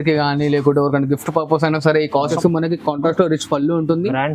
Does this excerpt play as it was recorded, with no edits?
no; 1 cut; at 2.3 s

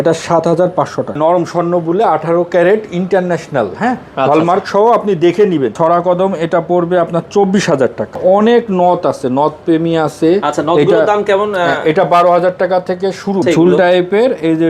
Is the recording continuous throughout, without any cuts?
no; 4 cuts; at 1.2 s, 5.7 s, 8.2 s, 13.4 s

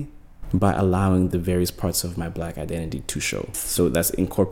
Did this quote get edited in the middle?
yes; 1 cut; at 3.6 s

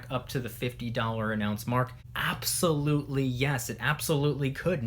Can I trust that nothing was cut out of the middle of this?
no; 1 cut; at 2.1 s

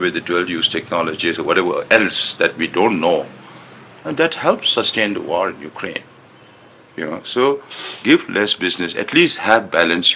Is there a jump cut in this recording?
no; 0 cuts

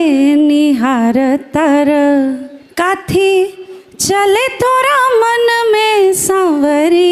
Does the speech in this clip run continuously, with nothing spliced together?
no; 1 cut; at 2.6 s

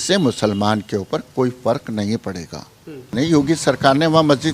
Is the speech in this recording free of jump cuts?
no; 1 cut; at 3.1 s

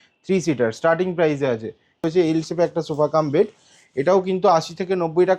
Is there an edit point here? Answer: yes; 1 cut; at 2.0 s

